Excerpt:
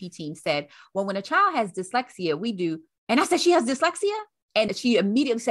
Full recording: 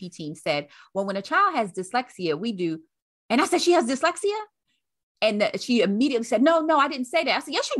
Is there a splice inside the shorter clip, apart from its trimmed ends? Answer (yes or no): yes